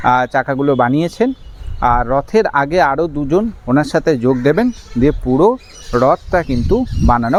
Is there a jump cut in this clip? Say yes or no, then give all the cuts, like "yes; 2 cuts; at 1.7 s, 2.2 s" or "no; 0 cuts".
no; 0 cuts